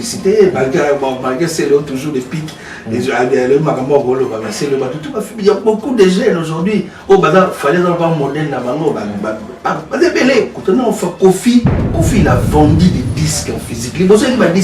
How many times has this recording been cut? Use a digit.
1